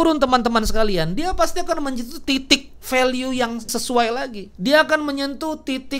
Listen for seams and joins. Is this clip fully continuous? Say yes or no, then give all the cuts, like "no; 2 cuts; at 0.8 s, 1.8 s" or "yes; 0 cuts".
no; 2 cuts; at 3.7 s, 4.4 s